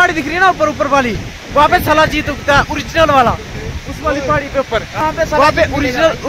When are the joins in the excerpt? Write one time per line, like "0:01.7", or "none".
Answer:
0:05.0